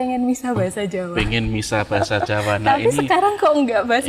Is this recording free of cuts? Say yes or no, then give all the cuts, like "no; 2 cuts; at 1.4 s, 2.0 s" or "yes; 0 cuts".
yes; 0 cuts